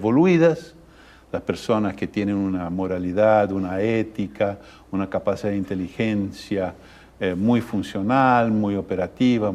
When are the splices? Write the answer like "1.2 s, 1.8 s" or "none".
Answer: 5.7 s